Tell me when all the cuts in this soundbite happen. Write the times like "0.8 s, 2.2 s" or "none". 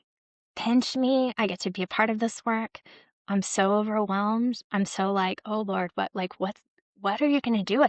none